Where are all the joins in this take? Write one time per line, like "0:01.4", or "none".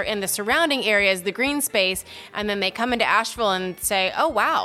none